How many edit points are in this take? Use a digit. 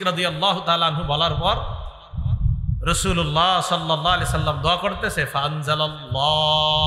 0